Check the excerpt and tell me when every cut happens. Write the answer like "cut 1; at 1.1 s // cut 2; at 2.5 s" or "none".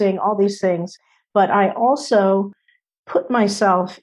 none